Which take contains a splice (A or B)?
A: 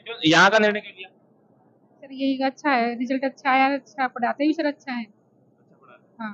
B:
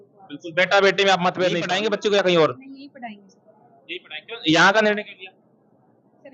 B